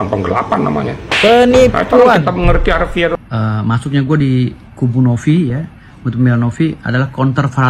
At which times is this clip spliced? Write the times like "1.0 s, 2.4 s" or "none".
3.1 s